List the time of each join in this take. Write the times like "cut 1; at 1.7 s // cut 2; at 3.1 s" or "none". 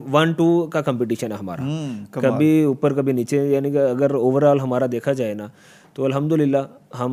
none